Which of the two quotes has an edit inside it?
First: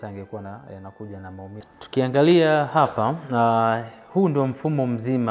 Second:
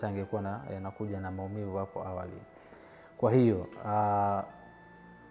first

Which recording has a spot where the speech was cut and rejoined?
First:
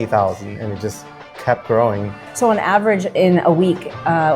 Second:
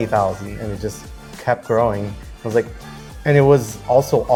first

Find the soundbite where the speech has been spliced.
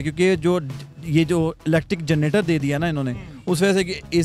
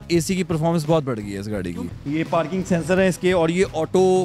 second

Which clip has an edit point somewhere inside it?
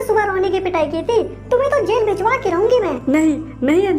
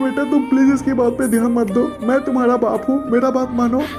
first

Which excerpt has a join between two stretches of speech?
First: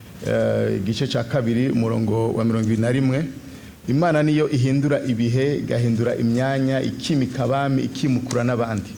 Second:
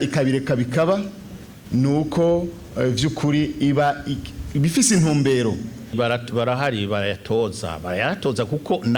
second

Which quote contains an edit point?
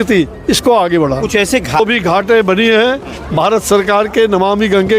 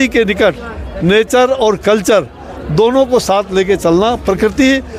first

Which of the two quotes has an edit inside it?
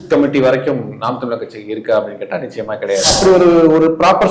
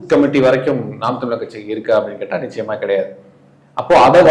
first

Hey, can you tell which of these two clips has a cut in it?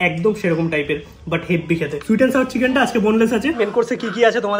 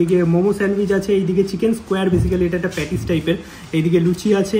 first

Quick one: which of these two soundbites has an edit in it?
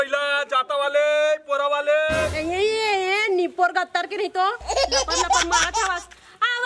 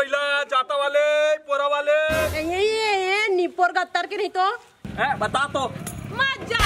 second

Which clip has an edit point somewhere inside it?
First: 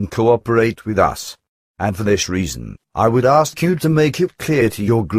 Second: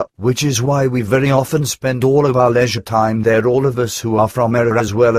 first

